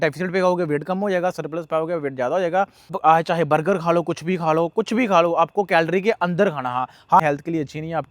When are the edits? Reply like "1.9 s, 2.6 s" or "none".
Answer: 2.9 s, 7.2 s